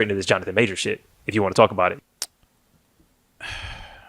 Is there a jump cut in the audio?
yes; 1 cut; at 2.0 s

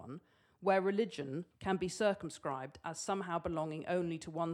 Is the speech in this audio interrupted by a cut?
yes; 1 cut; at 1.5 s

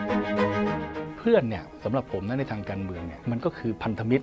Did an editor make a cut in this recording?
yes; 2 cuts; at 1.0 s, 3.1 s

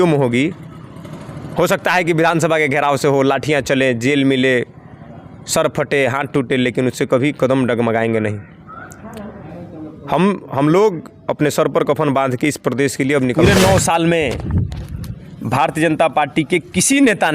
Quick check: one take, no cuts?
no; 1 cut; at 13.4 s

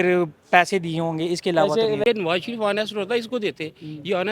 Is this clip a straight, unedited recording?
no; 1 cut; at 2.0 s

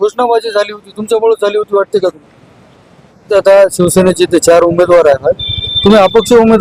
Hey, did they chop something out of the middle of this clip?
yes; 1 cut; at 3.3 s

